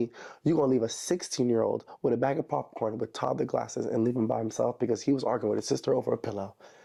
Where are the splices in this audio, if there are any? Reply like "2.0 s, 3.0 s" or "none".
none